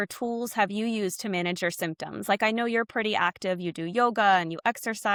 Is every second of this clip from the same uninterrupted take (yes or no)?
yes